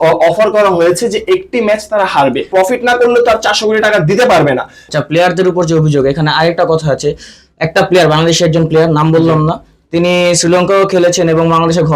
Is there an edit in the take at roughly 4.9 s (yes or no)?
yes